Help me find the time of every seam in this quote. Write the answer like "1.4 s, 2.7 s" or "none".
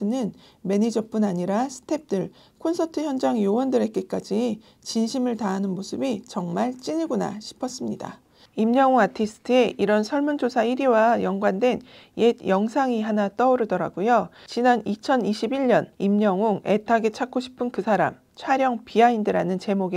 none